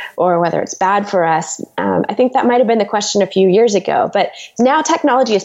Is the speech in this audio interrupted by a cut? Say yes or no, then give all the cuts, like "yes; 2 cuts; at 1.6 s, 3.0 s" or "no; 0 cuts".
no; 0 cuts